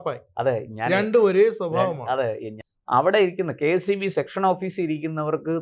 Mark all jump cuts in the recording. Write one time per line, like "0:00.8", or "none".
0:02.5